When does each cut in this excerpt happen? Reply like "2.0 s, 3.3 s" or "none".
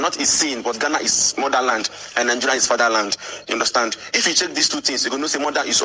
none